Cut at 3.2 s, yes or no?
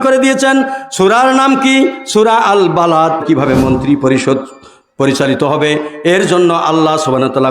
yes